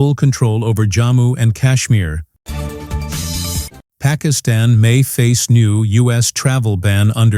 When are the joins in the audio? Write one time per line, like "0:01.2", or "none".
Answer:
0:02.2
0:03.8